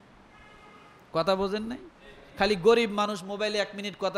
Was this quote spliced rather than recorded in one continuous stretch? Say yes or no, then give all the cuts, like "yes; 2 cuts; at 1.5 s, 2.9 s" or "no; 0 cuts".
no; 0 cuts